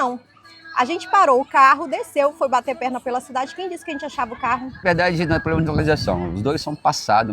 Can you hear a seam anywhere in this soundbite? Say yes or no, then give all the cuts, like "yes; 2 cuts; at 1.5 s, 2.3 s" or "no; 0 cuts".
yes; 1 cut; at 4.8 s